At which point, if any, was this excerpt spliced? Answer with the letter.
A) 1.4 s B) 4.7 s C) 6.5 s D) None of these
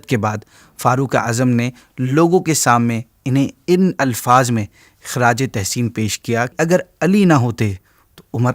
C